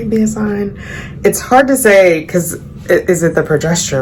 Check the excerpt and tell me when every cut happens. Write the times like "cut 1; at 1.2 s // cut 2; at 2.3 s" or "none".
none